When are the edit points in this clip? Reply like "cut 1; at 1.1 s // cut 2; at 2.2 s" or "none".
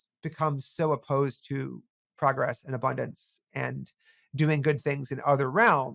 none